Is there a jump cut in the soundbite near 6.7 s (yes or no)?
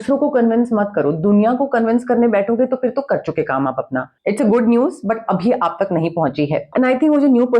yes